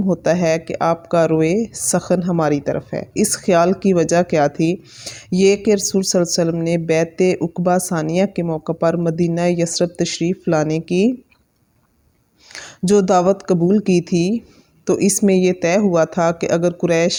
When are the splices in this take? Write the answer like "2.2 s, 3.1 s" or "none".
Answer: none